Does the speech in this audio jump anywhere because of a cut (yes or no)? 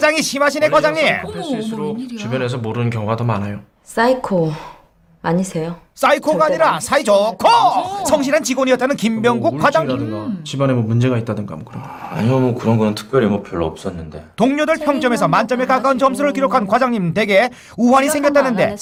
no